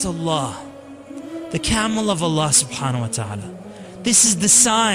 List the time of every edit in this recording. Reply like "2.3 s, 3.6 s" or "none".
none